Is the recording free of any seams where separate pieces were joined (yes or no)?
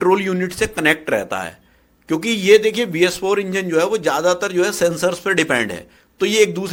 yes